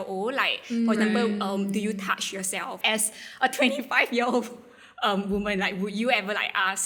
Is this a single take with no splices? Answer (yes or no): yes